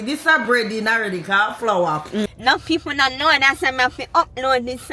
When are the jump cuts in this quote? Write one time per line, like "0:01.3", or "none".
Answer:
0:02.3